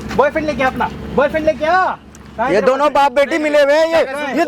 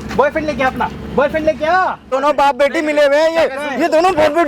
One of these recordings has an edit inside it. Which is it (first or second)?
second